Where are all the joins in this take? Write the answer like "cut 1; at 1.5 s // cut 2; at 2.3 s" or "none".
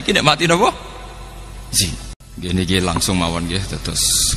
cut 1; at 2.2 s